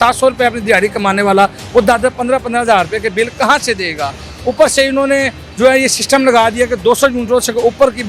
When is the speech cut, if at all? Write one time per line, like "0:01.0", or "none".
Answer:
none